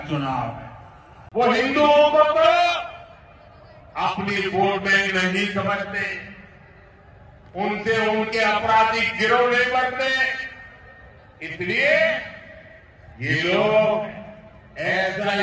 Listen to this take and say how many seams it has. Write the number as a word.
zero